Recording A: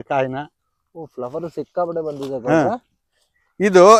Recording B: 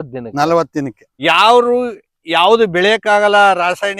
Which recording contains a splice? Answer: B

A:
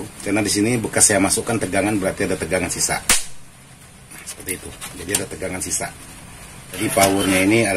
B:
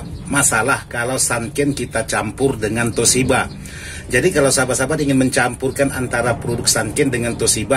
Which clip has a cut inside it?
A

